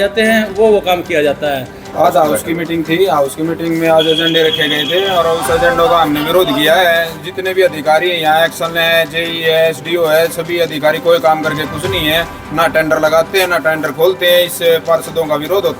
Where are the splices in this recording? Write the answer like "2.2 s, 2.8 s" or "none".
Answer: 1.9 s